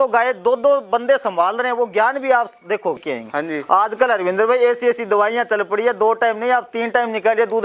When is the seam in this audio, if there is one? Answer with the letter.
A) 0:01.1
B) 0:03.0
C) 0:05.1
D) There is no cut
B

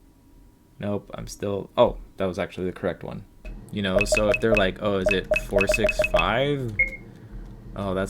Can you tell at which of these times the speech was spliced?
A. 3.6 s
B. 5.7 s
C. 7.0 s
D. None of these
A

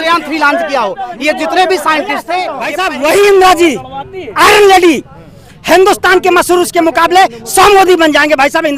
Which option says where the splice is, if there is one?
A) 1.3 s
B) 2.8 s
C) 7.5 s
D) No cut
B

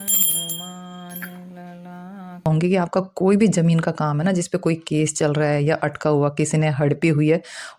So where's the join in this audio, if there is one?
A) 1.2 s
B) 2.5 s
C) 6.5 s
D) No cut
B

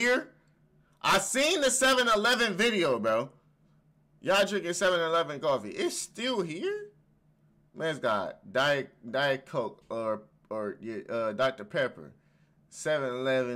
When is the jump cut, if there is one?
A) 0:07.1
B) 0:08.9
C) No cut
C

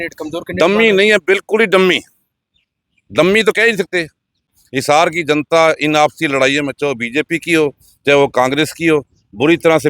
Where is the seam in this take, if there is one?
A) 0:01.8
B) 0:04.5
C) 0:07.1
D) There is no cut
B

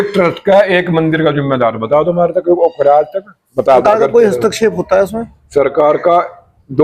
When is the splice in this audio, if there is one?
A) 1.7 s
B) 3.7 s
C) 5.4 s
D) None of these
B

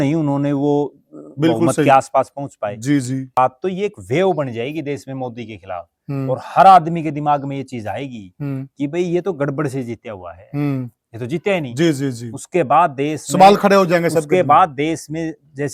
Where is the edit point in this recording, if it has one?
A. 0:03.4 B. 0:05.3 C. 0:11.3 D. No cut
A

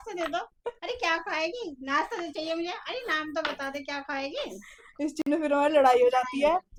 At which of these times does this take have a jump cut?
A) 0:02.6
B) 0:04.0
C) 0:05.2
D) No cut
D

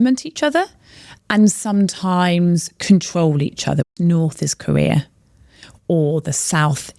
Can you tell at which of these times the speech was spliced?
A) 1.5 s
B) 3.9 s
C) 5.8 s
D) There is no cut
B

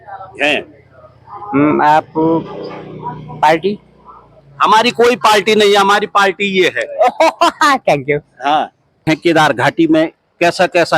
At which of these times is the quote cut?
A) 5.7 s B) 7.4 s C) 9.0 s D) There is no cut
C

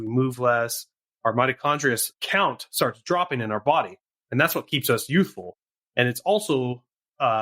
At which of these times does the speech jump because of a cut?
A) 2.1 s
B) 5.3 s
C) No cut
A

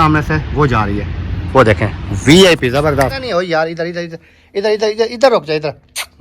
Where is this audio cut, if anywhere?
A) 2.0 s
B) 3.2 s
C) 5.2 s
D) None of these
B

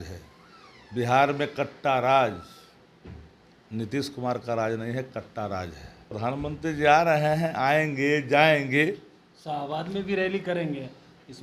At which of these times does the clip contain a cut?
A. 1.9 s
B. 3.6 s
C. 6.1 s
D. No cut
C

